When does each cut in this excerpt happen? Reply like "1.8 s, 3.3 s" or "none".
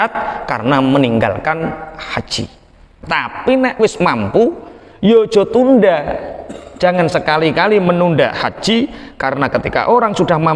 3.0 s